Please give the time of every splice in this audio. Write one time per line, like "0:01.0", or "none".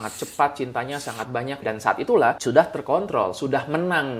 0:01.6
0:02.4